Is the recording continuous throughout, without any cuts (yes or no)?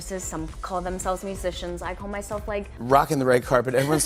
yes